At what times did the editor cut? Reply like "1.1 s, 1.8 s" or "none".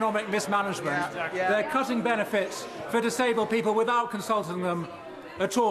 none

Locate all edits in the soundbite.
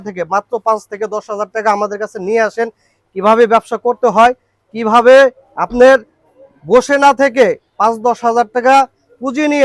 none

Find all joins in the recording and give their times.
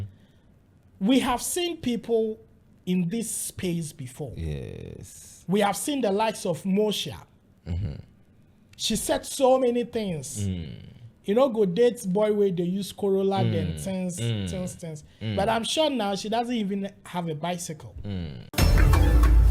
18.4 s

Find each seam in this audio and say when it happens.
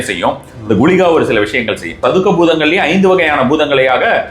2.0 s

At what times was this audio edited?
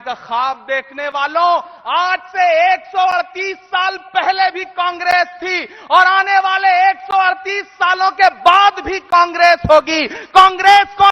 none

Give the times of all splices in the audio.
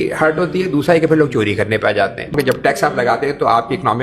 2.3 s

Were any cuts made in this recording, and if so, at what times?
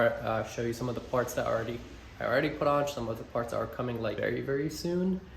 4.2 s

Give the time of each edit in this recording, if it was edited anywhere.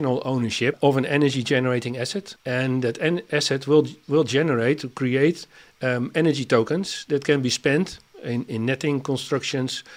0.8 s, 2.3 s

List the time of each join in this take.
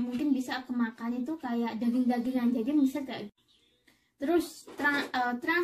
3.3 s

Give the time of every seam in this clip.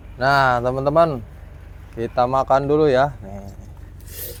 none

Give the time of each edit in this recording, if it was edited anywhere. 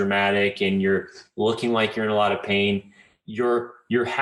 none

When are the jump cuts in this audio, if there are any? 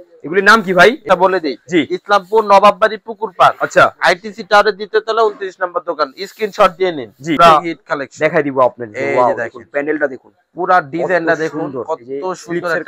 1.0 s, 7.4 s

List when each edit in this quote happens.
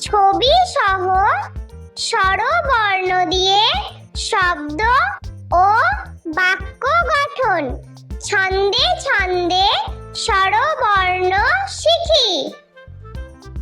12.6 s

